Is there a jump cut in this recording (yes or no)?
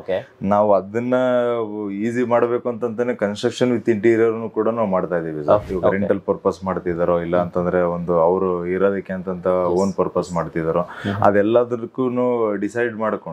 yes